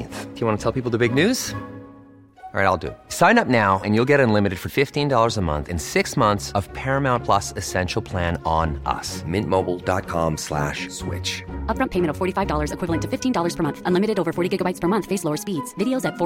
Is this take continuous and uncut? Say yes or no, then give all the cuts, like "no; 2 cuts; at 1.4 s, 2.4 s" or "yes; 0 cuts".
yes; 0 cuts